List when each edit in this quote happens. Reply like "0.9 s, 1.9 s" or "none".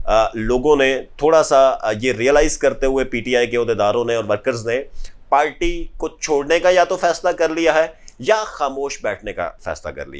none